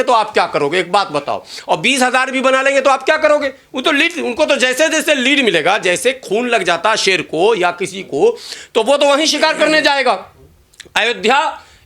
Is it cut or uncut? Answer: uncut